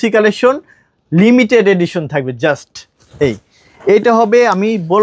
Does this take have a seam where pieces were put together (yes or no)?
no